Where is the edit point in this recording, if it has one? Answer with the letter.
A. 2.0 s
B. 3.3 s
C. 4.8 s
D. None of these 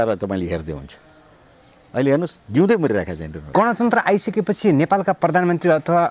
B